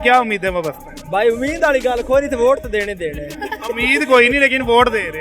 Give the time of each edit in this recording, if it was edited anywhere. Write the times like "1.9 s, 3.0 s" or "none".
none